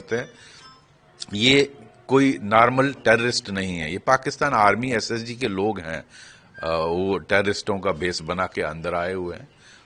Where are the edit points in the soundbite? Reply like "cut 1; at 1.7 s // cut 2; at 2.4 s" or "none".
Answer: none